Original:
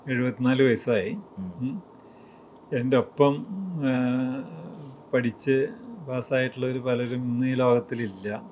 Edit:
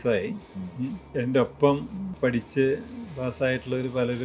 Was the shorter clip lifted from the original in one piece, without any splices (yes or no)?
no